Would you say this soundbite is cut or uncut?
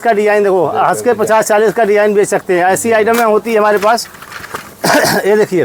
uncut